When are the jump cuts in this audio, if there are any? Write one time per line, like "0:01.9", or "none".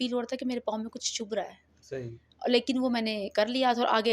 none